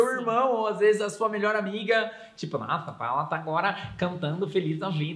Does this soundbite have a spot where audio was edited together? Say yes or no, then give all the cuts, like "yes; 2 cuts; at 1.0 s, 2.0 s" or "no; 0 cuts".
no; 0 cuts